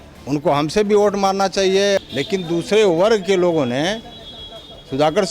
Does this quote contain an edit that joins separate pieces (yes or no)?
yes